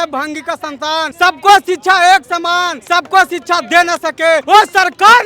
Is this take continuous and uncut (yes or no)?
no